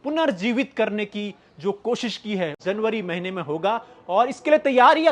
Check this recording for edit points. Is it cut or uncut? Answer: cut